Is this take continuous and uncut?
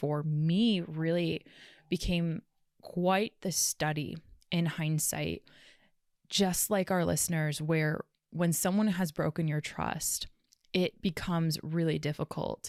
yes; 0 cuts

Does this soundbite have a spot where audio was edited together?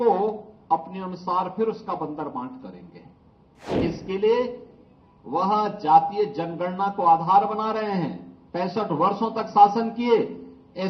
yes; 1 cut; at 3.8 s

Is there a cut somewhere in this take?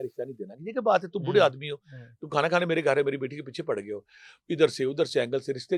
no; 0 cuts

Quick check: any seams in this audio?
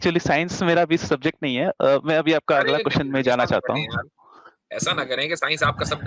no; 0 cuts

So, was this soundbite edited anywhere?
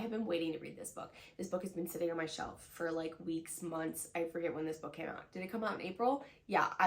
no; 0 cuts

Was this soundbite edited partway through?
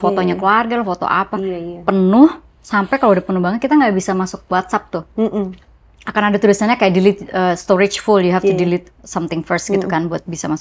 no; 0 cuts

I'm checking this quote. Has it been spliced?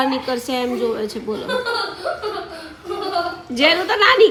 no; 0 cuts

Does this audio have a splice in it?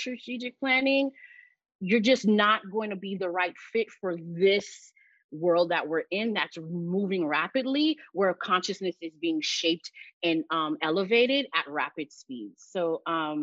no; 0 cuts

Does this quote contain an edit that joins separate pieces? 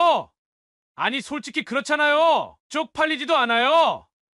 yes; 1 cut; at 2.6 s

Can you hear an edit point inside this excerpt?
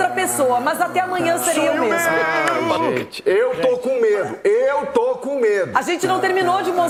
no; 0 cuts

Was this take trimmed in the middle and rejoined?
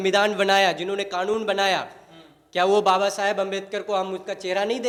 no; 0 cuts

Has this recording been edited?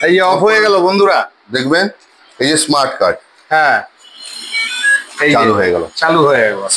no; 0 cuts

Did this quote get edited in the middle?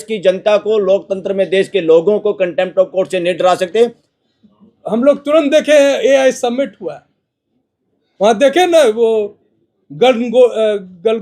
yes; 1 cut; at 4.1 s

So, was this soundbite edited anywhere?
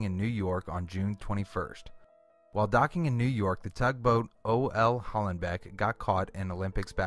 yes; 1 cut; at 2.6 s

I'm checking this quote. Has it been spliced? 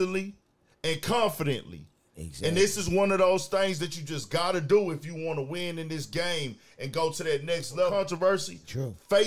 yes; 1 cut; at 7.9 s

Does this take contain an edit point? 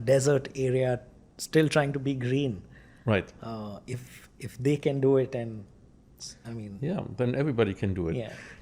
no; 0 cuts

